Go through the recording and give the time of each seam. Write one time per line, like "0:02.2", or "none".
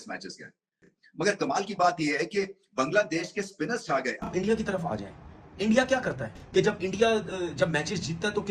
0:04.1
0:06.3